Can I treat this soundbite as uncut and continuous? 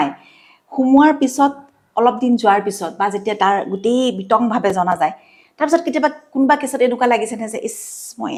yes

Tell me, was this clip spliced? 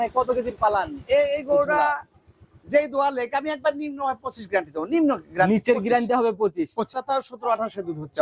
yes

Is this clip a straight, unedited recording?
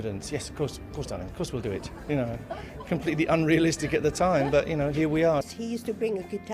no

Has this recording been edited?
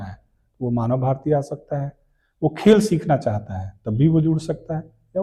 no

